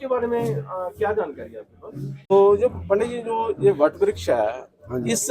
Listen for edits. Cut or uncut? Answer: cut